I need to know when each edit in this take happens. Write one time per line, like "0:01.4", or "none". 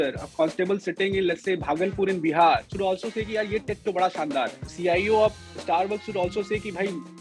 0:02.7
0:04.6